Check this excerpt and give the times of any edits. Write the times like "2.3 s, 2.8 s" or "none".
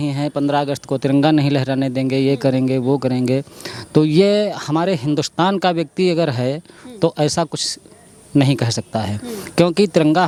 none